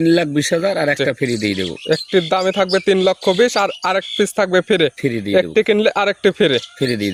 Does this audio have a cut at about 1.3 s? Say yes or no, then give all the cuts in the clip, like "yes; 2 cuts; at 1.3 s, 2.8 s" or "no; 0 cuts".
no; 0 cuts